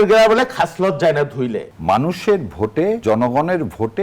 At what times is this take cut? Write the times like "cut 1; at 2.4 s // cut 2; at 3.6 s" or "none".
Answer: cut 1; at 1.7 s // cut 2; at 3.0 s